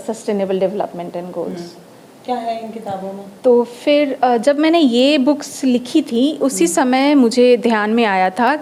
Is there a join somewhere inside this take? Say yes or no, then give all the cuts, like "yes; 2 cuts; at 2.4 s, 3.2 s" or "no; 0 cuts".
no; 0 cuts